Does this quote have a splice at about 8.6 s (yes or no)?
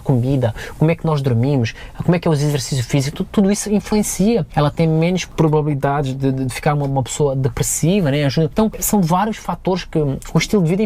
yes